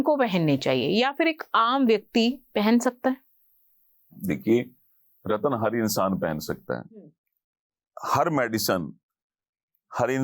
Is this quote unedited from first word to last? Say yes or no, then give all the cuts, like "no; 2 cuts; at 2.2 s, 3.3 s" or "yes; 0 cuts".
yes; 0 cuts